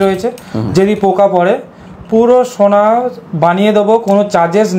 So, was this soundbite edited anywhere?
no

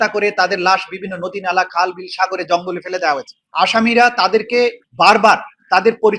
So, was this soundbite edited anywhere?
yes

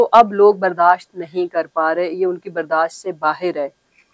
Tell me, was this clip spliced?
no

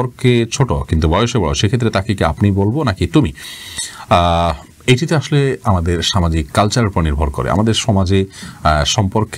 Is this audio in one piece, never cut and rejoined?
yes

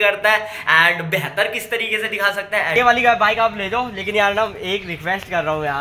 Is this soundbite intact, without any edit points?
no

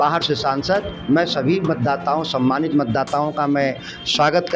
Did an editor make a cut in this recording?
yes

